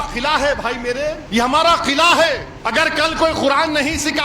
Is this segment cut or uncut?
cut